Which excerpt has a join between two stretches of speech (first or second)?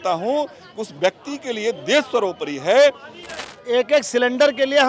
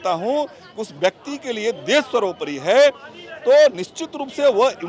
first